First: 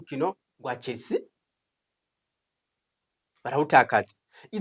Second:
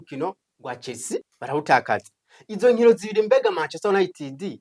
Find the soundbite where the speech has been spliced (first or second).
second